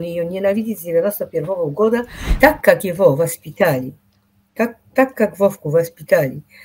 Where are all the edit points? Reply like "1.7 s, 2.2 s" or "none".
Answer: 2.2 s